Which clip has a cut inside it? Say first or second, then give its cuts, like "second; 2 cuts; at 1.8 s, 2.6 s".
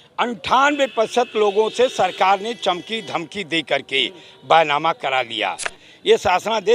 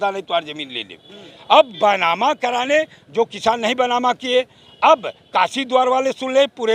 first; 1 cut; at 5.7 s